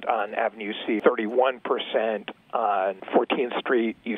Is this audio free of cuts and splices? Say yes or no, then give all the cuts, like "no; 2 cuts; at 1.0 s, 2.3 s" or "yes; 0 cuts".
no; 2 cuts; at 1.0 s, 3.0 s